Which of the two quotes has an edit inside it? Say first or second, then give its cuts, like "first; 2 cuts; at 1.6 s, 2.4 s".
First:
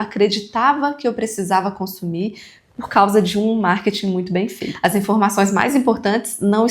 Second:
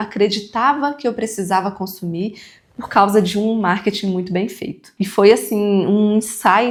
first; 1 cut; at 4.6 s